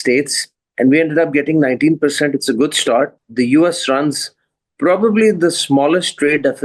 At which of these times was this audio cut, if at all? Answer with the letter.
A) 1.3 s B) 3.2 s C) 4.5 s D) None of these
B